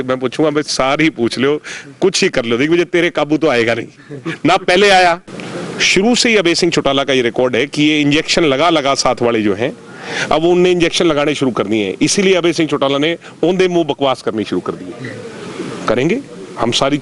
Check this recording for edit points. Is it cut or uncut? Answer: cut